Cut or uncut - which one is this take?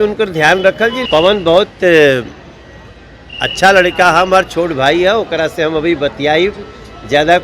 cut